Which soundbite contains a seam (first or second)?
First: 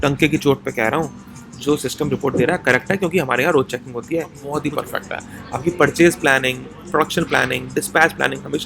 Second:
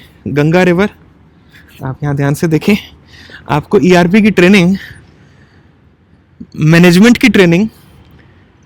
first